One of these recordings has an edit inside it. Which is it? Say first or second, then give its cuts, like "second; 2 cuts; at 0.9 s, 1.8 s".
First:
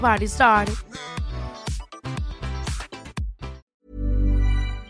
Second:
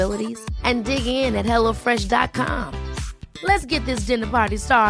first; 1 cut; at 3.6 s